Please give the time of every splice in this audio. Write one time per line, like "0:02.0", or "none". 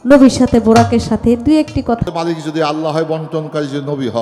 0:02.0